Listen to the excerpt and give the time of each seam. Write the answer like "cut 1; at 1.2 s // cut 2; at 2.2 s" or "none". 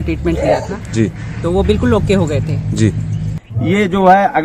cut 1; at 3.4 s